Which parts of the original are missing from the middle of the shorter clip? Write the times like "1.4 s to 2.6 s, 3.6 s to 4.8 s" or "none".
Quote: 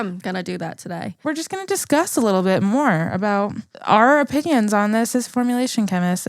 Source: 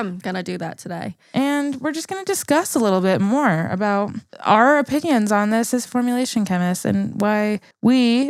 1.2 s to 1.8 s